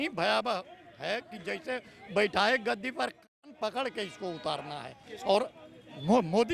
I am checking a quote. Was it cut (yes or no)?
no